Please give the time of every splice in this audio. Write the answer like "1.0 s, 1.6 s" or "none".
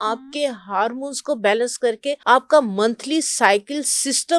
2.2 s